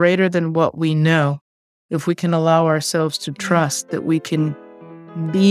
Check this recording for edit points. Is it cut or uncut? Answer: uncut